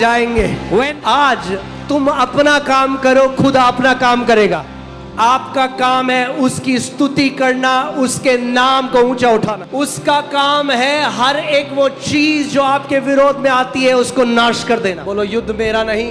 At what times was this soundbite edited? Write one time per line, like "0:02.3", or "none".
0:00.9
0:04.7
0:09.5
0:15.0